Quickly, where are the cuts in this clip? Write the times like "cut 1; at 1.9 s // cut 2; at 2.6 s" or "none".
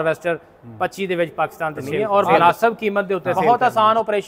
cut 1; at 1.9 s // cut 2; at 3.3 s